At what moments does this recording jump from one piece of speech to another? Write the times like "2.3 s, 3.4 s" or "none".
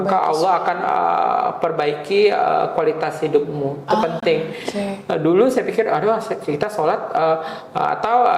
none